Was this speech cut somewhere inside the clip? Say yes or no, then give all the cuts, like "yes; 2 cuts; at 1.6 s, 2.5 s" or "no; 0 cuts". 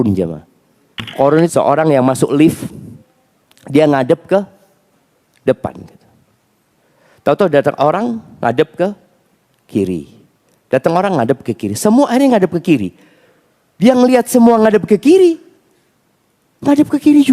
yes; 1 cut; at 1.5 s